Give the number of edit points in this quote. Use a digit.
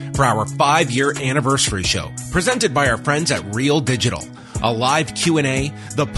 0